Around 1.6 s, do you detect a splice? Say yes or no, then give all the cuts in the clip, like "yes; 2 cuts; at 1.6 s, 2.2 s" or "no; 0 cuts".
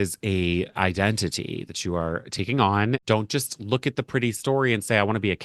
no; 1 cut; at 3.0 s